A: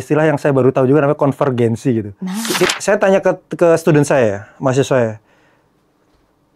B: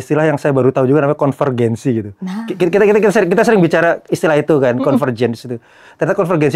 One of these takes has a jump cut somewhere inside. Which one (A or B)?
A